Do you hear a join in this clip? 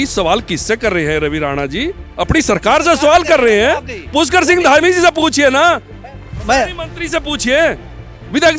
no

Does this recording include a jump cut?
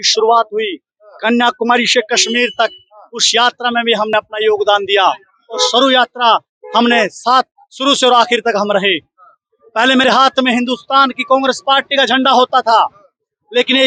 no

